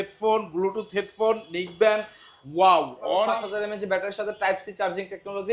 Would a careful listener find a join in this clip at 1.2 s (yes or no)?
no